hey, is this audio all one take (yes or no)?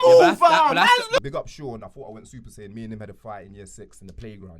no